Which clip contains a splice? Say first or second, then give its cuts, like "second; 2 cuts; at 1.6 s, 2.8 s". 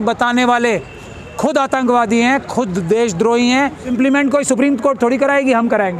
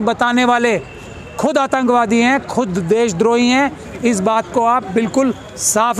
first; 1 cut; at 3.9 s